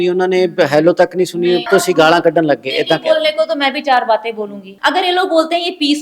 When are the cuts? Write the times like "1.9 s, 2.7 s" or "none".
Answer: 1.6 s, 4.6 s